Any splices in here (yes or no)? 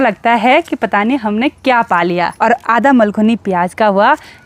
yes